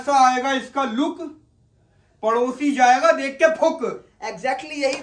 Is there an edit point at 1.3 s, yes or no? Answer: no